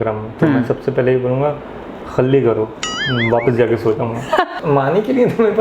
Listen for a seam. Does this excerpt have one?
yes; 1 cut; at 4.6 s

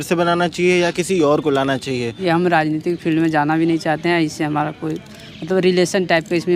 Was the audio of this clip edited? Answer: yes; 1 cut; at 2.2 s

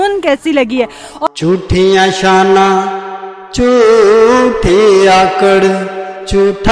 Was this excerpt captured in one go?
no; 1 cut; at 1.3 s

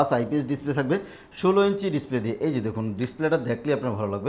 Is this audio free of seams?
yes; 0 cuts

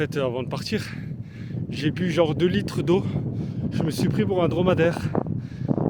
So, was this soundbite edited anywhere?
no; 0 cuts

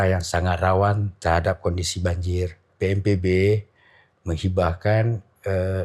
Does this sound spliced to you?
yes; 1 cut; at 2.6 s

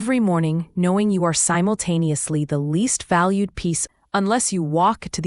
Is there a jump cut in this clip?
yes; 1 cut; at 3.8 s

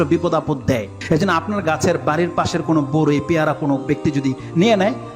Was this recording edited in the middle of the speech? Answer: yes; 1 cut; at 1.0 s

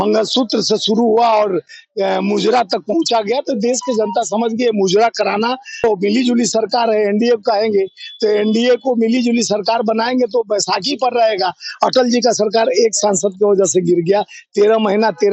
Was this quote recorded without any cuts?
no; 1 cut; at 5.8 s

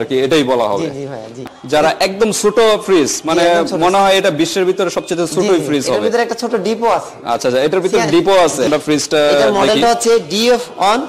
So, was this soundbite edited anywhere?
yes; 2 cuts; at 1.4 s, 8.7 s

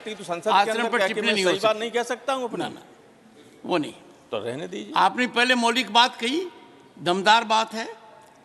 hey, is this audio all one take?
yes; 0 cuts

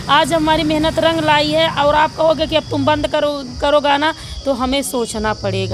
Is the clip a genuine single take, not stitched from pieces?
yes; 0 cuts

